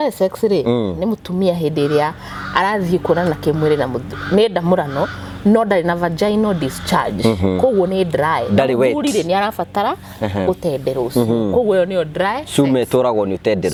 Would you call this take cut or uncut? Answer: uncut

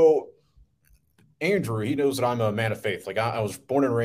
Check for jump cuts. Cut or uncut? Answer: uncut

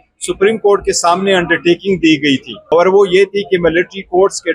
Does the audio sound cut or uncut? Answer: cut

